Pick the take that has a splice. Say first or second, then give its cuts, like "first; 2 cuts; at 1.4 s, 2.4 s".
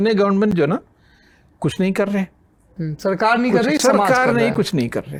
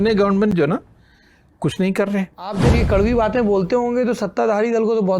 second; 1 cut; at 2.6 s